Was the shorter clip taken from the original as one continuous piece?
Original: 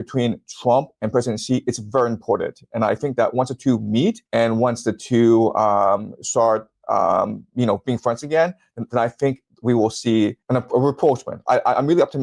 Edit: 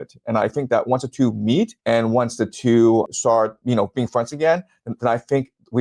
no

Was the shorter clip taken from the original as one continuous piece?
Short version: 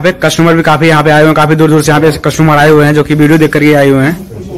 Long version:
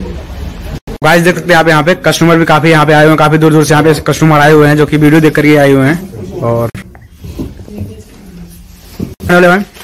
yes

